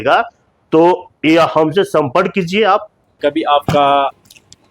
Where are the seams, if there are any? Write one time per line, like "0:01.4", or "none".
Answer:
0:03.1